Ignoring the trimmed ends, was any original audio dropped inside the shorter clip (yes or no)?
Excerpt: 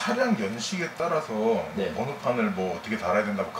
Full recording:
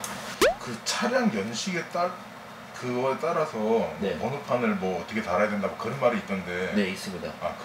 yes